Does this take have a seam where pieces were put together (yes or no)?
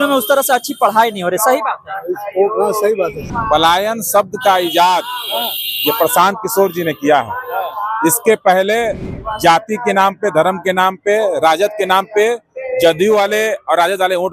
yes